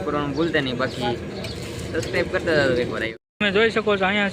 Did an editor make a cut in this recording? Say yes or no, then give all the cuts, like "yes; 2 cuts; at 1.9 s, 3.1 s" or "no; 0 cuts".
yes; 1 cut; at 3.1 s